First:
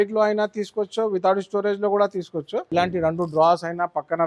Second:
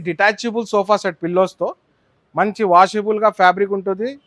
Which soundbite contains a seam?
first; 1 cut; at 2.7 s

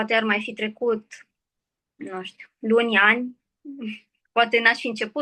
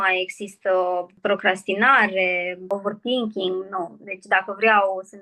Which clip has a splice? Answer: second; 2 cuts; at 1.2 s, 2.7 s

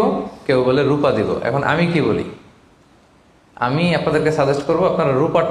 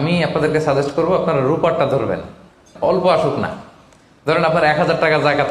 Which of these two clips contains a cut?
second; 1 cut; at 2.7 s

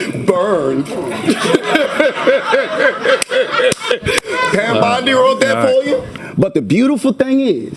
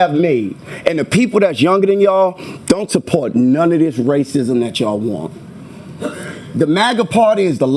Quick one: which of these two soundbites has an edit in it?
first; 1 cut; at 6.2 s

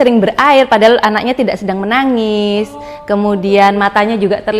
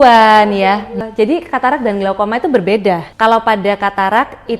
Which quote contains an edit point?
second; 2 cuts; at 1.1 s, 3.1 s

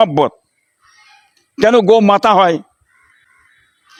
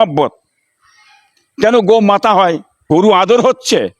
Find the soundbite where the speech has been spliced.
second; 1 cut; at 2.7 s

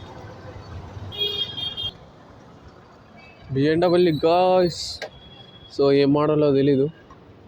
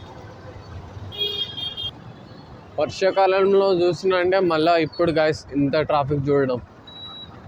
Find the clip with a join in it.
first; 1 cut; at 1.9 s

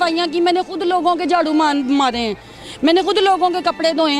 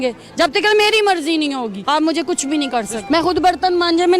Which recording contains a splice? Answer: second; 2 cuts; at 1.8 s, 3.0 s

